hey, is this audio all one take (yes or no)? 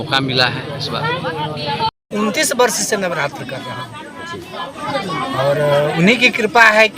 no